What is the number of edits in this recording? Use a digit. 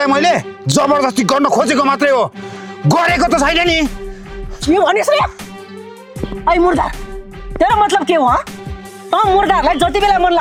0